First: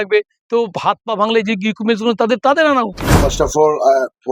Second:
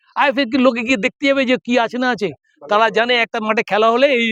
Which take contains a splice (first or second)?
first